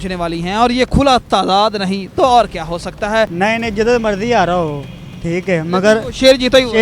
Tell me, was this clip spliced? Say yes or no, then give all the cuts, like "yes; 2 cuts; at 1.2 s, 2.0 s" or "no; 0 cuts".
yes; 1 cut; at 3.3 s